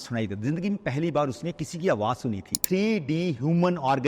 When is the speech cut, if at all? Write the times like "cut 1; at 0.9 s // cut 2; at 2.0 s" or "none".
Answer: cut 1; at 2.5 s